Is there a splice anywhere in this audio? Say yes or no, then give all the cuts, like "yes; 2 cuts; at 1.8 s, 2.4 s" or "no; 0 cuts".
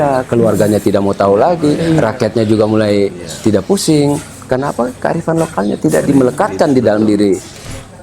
no; 0 cuts